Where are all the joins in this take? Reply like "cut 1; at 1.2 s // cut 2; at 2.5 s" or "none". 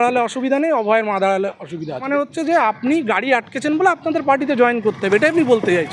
cut 1; at 2.0 s